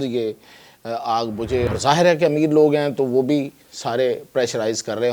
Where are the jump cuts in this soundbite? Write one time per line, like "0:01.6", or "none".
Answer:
0:01.7